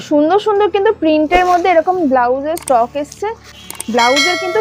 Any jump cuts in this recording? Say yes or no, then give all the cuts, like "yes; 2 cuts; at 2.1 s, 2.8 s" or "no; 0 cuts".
yes; 1 cut; at 3.5 s